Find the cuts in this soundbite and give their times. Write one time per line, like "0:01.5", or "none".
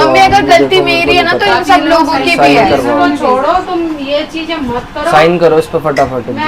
none